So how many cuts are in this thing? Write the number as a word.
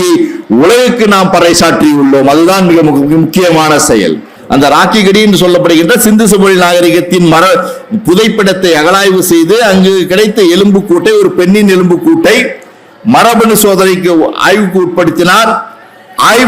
one